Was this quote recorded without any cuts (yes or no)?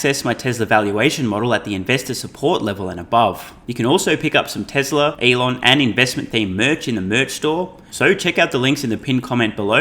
no